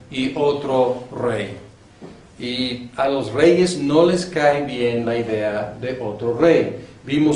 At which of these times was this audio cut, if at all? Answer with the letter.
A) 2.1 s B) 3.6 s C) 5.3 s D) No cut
B